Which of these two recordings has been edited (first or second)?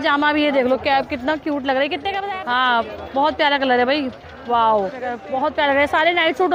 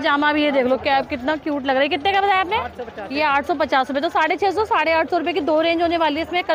first